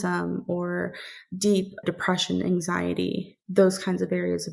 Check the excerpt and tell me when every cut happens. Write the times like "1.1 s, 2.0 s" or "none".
1.8 s